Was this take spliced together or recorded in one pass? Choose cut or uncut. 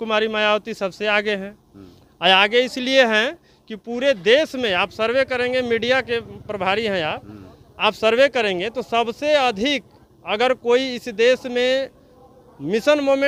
uncut